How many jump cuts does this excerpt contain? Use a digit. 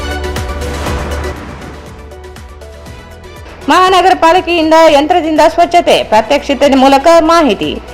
0